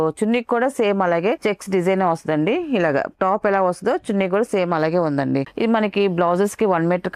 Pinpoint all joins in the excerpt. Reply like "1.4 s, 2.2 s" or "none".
1.4 s, 5.5 s